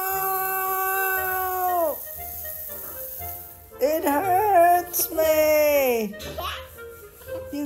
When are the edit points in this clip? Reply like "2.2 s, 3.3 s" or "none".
2.0 s, 3.8 s